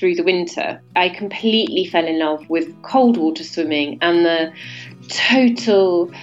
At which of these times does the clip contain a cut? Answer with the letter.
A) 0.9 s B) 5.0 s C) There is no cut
A